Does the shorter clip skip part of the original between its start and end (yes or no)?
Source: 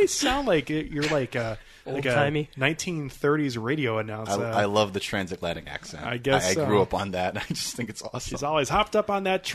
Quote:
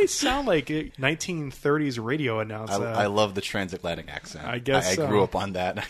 yes